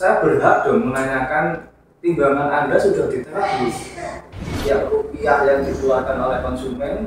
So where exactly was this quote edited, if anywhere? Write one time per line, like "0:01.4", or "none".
0:04.6